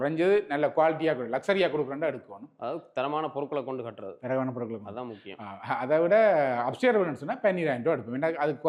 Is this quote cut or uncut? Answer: uncut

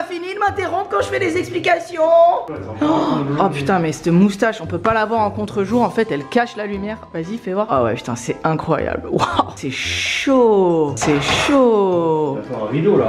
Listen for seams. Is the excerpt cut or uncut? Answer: uncut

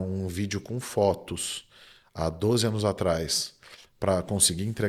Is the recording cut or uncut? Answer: uncut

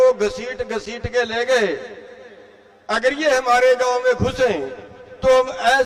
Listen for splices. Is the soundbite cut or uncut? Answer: uncut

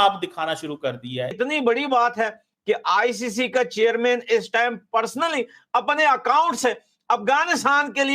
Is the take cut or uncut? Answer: cut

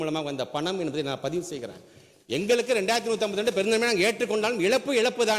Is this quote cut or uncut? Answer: uncut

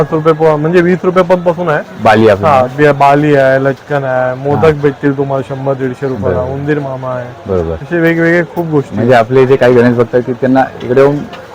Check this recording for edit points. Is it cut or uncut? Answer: uncut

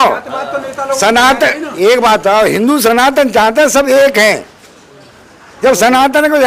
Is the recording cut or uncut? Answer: uncut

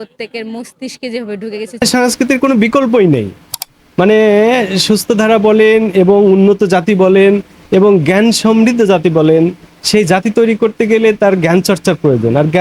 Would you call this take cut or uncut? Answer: cut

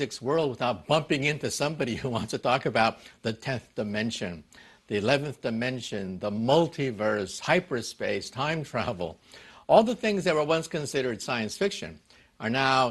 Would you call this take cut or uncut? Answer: uncut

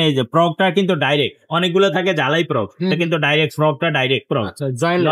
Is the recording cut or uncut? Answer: uncut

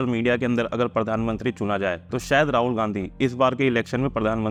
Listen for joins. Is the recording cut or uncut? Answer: uncut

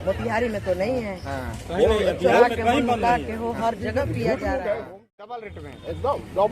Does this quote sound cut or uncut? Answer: cut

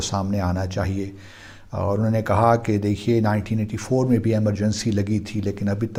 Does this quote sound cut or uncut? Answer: uncut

